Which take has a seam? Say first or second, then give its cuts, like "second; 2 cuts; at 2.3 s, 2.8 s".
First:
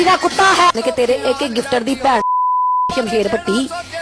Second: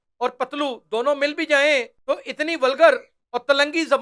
second; 1 cut; at 1.9 s